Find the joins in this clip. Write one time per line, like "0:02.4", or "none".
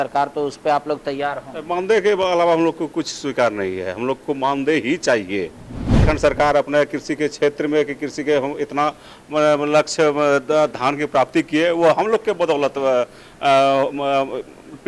0:06.0